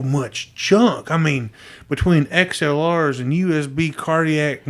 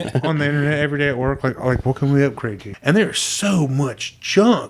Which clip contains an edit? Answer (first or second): second